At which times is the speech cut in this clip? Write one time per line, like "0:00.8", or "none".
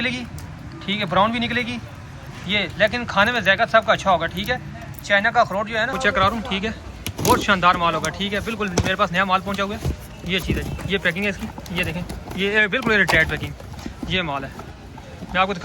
0:06.0